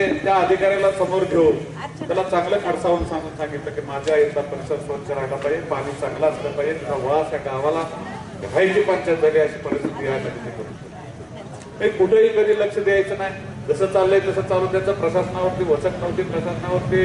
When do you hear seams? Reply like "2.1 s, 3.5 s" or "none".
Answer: none

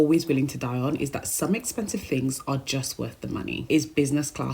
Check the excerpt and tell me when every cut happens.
3.6 s

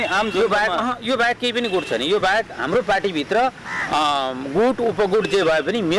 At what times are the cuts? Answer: none

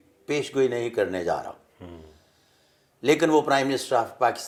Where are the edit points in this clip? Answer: none

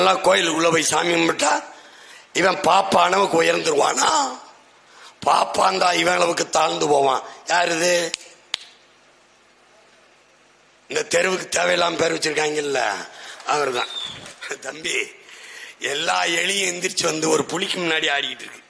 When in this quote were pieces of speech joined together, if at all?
14.3 s

